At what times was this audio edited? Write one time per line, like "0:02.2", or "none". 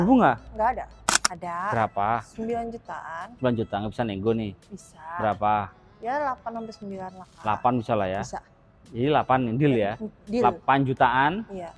0:01.1